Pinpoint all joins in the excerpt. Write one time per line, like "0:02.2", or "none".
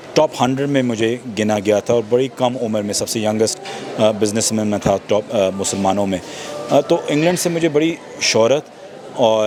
none